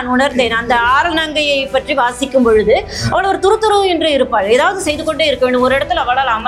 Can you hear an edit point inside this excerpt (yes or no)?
no